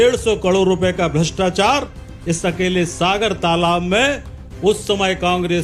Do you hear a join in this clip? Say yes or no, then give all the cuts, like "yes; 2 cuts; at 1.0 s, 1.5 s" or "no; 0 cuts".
no; 0 cuts